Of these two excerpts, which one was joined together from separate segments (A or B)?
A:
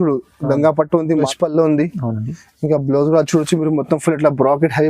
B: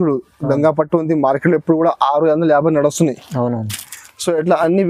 A